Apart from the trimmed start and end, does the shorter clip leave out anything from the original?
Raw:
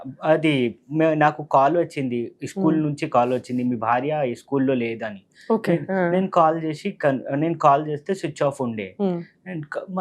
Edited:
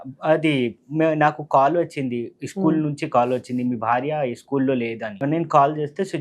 yes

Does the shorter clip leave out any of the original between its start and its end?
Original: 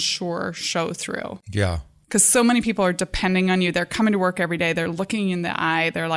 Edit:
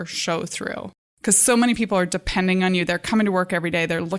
yes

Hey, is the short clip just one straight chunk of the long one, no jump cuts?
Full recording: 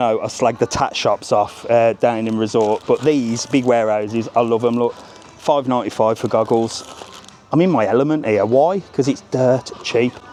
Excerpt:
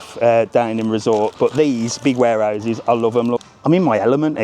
no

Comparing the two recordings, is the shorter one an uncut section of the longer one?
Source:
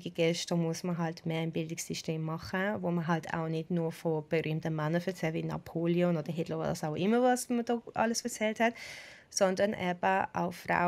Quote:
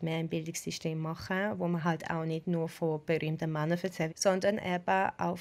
no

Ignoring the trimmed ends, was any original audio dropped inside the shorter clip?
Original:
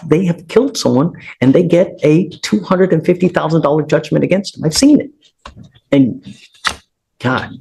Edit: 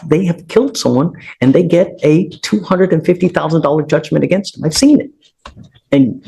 no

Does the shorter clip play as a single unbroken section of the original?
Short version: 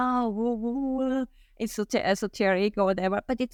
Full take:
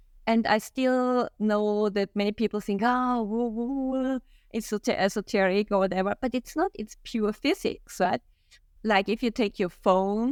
yes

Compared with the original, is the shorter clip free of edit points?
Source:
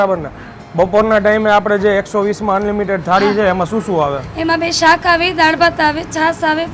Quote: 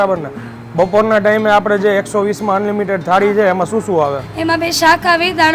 yes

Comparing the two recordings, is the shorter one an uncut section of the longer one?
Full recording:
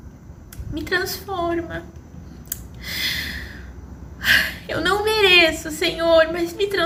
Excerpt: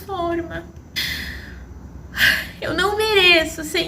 no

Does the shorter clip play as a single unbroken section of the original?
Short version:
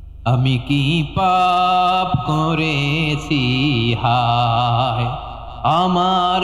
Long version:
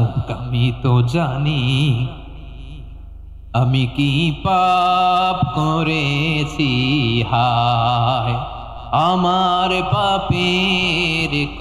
yes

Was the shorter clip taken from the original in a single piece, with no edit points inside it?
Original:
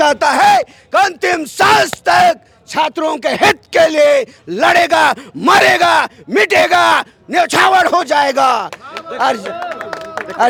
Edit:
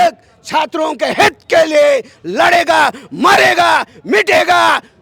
yes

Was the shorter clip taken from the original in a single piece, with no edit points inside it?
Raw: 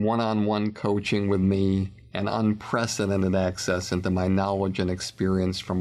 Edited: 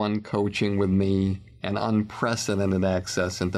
yes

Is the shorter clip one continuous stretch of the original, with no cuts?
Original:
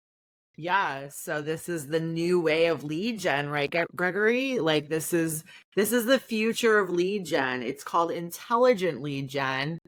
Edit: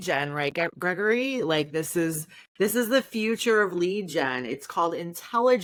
yes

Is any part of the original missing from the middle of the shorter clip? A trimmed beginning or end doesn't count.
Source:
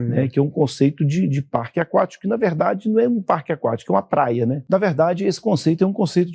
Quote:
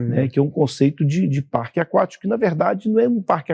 no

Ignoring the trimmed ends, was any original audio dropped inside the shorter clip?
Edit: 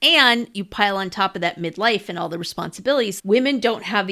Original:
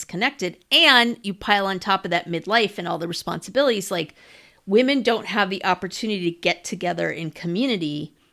yes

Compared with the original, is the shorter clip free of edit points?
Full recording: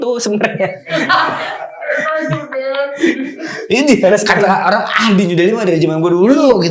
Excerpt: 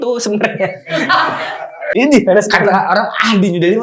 no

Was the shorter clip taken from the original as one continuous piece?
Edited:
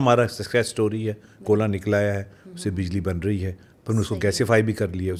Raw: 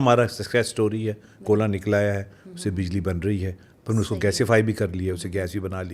yes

